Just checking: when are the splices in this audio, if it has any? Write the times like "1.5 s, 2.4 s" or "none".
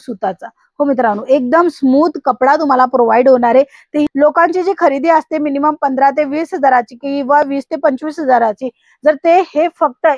4.1 s